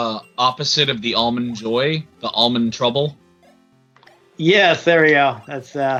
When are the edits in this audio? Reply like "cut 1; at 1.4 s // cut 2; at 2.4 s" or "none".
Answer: none